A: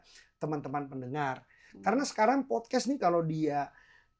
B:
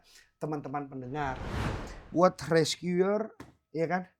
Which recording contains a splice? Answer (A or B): B